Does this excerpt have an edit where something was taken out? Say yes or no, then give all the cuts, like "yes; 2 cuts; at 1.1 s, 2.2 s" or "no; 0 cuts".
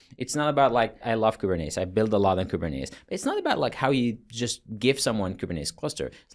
yes; 1 cut; at 1.0 s